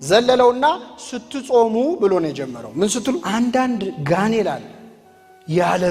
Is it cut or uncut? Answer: cut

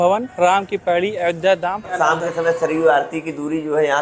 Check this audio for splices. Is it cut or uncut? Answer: cut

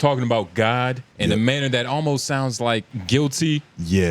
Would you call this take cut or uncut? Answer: cut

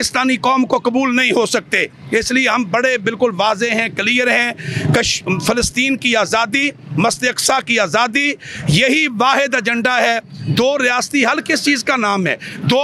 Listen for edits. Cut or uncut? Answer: uncut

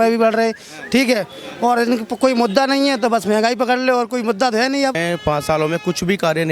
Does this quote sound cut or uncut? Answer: cut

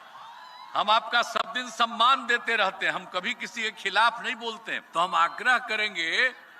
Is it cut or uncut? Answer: cut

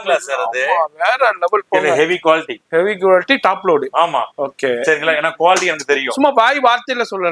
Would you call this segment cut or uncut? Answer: uncut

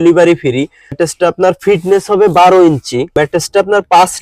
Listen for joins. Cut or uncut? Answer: cut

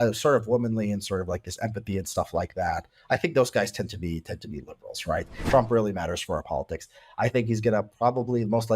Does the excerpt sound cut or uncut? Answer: cut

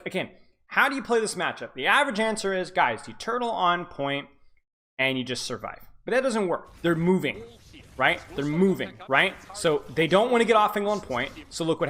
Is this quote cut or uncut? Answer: cut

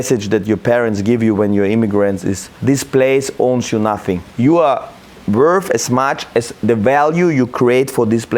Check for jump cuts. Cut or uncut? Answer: cut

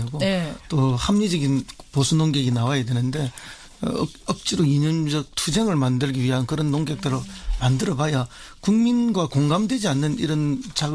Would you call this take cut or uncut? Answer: uncut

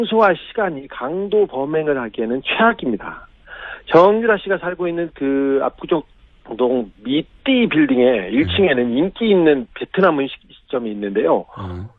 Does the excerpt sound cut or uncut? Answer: cut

